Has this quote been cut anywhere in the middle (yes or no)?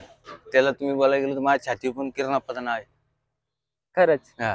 no